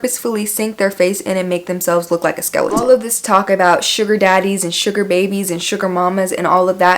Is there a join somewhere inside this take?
yes; 1 cut; at 2.7 s

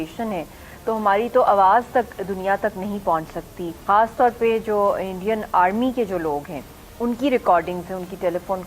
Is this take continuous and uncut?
no; 1 cut; at 3.7 s

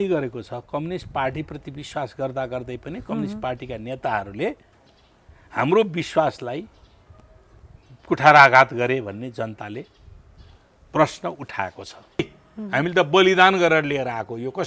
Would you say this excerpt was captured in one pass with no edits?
no; 1 cut; at 12.1 s

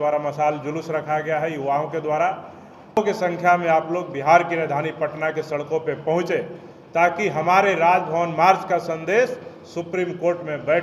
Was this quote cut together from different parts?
yes; 1 cut; at 3.0 s

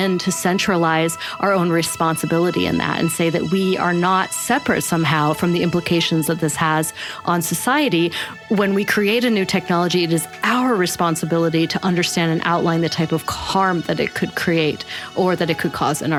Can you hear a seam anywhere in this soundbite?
no; 0 cuts

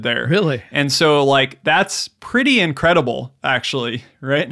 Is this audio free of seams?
yes; 0 cuts

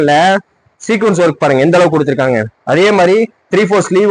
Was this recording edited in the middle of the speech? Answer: no; 0 cuts

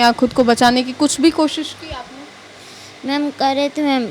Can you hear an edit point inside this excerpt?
no; 0 cuts

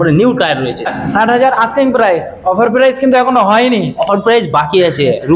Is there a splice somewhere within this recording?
yes; 1 cut; at 1.0 s

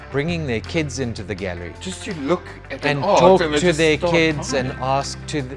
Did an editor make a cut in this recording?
no; 0 cuts

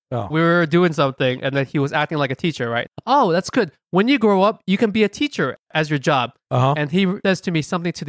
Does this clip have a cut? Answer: yes; 2 cuts; at 2.8 s, 7.2 s

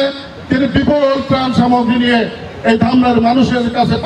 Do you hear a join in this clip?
no; 0 cuts

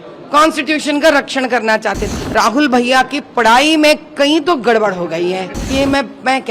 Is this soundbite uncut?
no; 2 cuts; at 2.0 s, 5.6 s

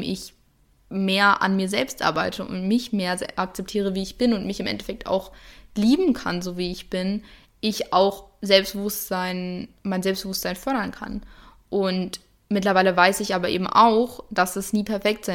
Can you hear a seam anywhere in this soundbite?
no; 0 cuts

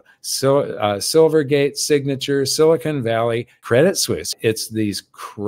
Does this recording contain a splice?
yes; 2 cuts; at 3.6 s, 4.3 s

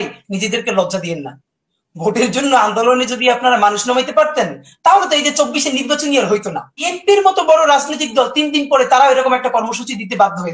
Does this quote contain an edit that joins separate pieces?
yes; 1 cut; at 6.8 s

